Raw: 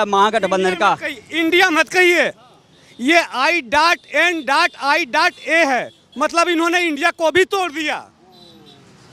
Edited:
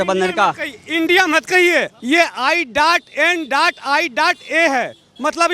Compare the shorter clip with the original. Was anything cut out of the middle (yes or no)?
yes